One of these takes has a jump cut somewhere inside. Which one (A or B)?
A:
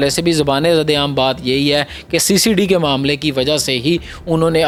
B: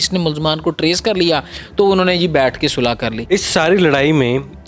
B